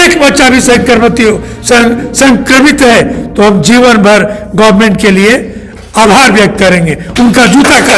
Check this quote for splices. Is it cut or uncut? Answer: uncut